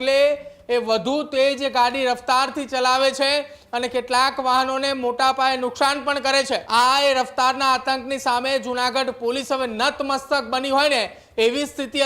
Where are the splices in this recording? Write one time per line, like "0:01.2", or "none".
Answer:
0:06.6